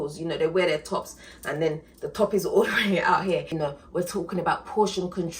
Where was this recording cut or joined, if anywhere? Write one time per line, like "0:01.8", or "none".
0:03.5